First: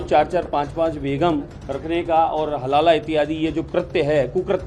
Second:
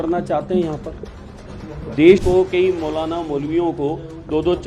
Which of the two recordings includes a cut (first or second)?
second